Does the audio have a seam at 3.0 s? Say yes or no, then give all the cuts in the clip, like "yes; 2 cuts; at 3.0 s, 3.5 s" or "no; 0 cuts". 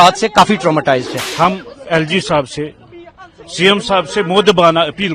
no; 1 cut; at 1.2 s